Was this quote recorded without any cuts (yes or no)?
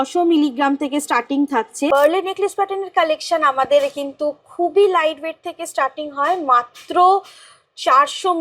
no